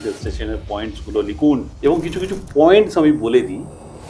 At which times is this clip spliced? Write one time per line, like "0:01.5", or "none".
0:01.7